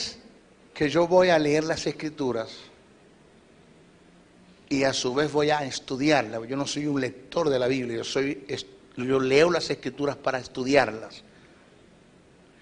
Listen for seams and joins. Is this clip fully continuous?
no; 1 cut; at 6.4 s

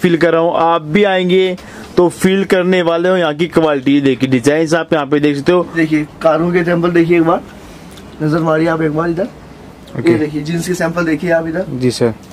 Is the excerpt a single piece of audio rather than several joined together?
no; 1 cut; at 5.8 s

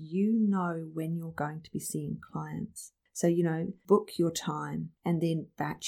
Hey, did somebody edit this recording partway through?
no; 0 cuts

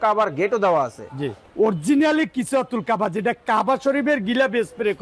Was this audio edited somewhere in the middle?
yes; 1 cut; at 1.4 s

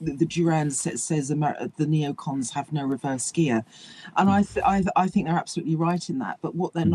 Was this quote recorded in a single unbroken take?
yes; 0 cuts

